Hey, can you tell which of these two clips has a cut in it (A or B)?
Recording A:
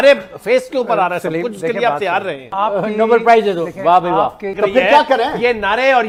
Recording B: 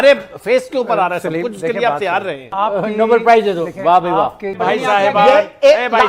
B